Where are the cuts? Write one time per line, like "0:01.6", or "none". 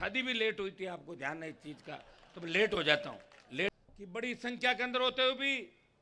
0:03.7